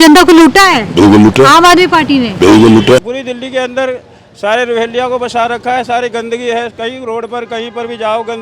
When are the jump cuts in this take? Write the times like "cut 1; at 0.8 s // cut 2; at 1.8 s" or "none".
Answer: cut 1; at 3.1 s